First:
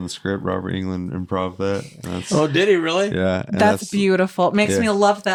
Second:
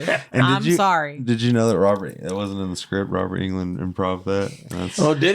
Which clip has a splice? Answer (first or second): second